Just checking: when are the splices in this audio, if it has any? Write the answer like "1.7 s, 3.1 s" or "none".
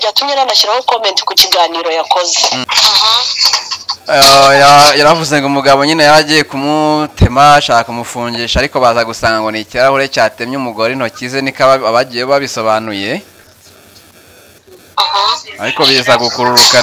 2.6 s